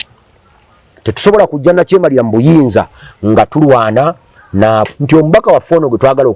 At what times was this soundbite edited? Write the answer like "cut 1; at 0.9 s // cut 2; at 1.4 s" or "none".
cut 1; at 5.0 s